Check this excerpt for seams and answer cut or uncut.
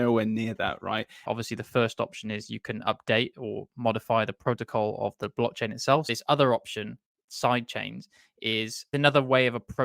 cut